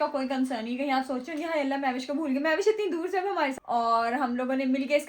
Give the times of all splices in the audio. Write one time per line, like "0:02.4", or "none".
0:03.5